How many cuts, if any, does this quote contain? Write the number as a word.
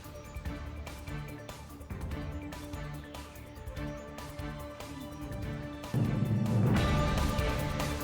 one